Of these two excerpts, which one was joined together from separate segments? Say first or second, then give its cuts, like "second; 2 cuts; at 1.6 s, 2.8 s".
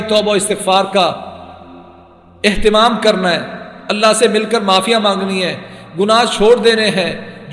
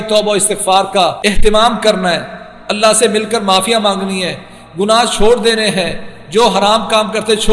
second; 1 cut; at 1.2 s